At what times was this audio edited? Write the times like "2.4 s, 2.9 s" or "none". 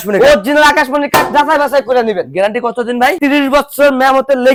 none